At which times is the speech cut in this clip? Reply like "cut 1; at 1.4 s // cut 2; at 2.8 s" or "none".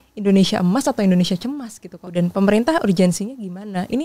cut 1; at 2.0 s